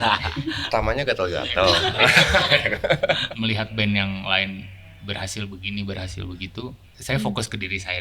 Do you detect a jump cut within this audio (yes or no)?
yes